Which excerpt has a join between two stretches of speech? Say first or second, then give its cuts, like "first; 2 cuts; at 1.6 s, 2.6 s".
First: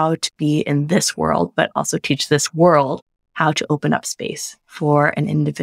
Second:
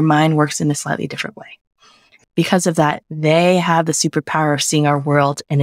second; 1 cut; at 2.1 s